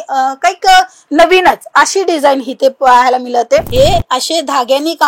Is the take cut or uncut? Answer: cut